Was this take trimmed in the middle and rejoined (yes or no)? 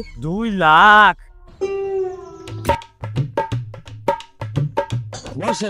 no